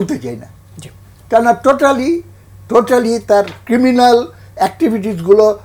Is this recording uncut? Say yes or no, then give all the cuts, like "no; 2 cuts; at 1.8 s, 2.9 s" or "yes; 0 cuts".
yes; 0 cuts